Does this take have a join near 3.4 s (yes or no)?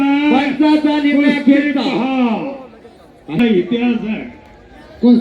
yes